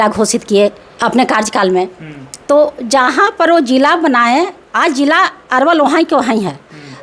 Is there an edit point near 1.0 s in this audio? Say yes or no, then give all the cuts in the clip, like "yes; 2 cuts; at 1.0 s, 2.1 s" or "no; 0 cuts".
yes; 1 cut; at 1.0 s